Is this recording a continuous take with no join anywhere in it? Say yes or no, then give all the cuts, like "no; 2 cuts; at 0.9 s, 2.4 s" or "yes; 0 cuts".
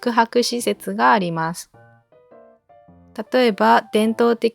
yes; 0 cuts